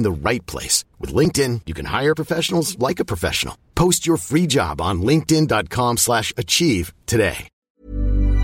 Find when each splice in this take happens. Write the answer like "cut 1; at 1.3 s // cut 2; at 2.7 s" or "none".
cut 1; at 7.5 s